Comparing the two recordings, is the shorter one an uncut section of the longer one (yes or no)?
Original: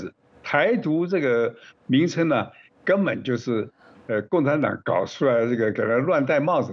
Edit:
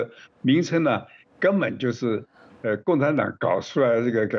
yes